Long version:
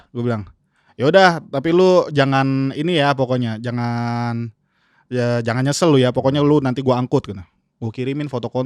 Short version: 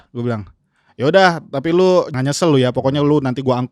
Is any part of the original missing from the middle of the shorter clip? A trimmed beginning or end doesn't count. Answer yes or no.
yes